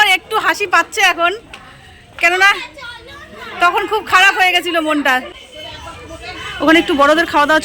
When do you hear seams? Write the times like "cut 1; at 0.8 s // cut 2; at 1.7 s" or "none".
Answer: cut 1; at 5.3 s